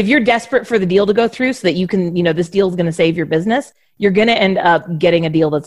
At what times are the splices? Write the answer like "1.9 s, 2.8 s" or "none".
none

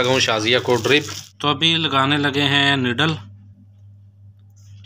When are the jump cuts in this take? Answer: 1.2 s

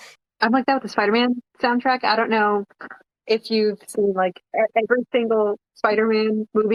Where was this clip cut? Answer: none

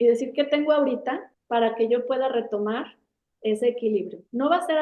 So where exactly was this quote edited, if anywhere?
1.3 s

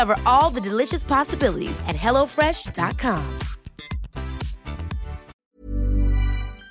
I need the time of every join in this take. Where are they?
5.3 s

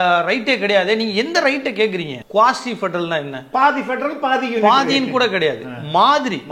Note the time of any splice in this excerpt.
2.2 s

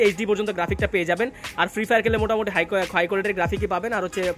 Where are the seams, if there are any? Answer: none

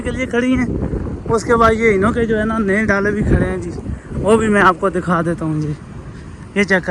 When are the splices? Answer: none

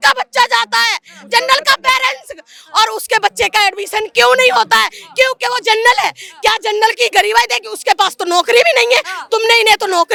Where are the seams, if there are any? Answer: none

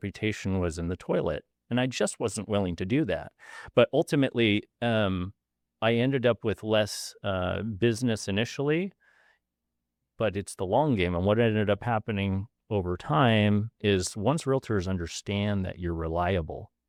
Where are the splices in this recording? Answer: none

